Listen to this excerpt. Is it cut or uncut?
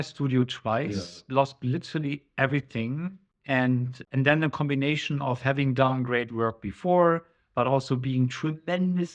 cut